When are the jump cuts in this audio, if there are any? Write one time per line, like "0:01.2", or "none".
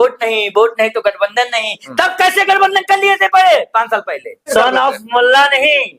0:04.5